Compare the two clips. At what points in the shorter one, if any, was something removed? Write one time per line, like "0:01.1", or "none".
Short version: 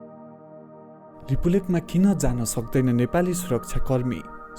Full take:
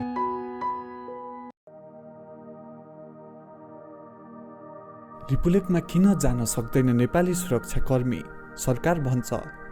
0:01.3